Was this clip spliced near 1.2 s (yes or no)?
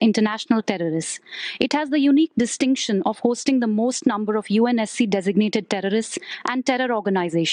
no